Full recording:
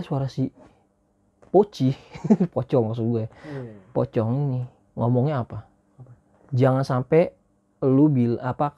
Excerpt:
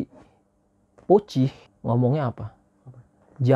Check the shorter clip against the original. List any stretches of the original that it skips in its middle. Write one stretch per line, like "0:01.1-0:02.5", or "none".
0:02.1-0:04.8